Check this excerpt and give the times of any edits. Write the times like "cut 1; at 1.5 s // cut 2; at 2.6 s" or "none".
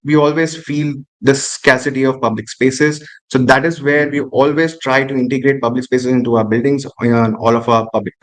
none